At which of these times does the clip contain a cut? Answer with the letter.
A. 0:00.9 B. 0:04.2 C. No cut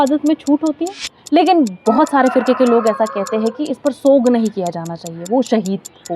A